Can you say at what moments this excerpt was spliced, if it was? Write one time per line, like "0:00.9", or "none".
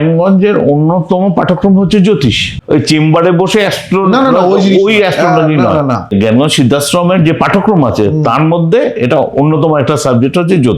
0:02.5
0:06.1